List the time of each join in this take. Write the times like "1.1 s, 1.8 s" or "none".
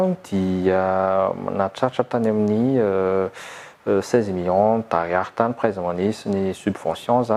none